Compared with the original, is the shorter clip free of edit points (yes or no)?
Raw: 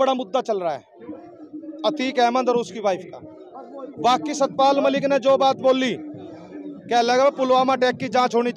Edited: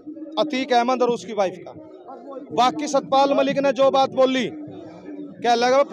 yes